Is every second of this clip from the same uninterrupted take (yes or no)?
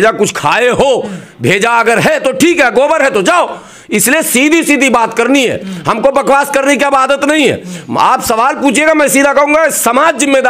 yes